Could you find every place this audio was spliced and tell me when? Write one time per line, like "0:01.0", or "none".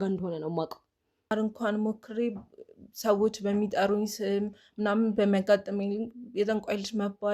0:01.3